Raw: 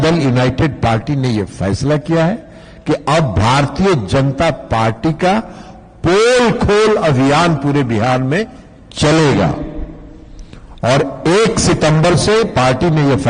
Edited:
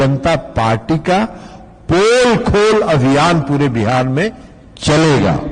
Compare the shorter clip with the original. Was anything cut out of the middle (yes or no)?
no